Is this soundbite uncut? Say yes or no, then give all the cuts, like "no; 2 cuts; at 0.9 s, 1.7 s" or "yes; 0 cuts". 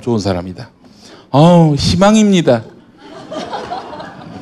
yes; 0 cuts